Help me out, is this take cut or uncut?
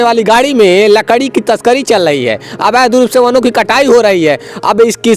uncut